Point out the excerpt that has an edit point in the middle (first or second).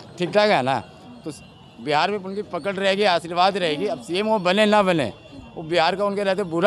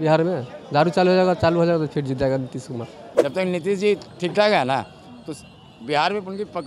second